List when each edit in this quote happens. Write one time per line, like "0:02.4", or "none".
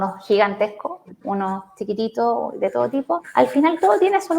0:03.3

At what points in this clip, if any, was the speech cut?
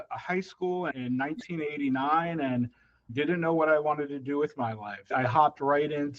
0:00.9
0:03.1
0:05.1

